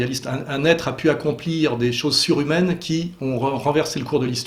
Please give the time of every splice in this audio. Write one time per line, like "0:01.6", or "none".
none